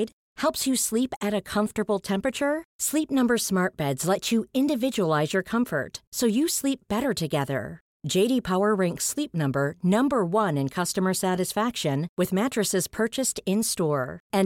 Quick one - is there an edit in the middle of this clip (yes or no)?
no